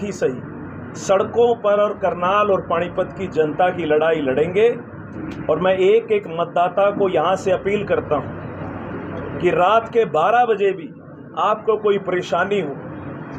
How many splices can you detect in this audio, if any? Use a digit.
0